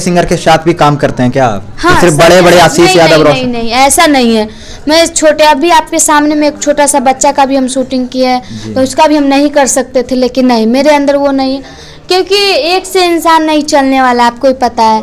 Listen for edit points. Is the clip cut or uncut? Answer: uncut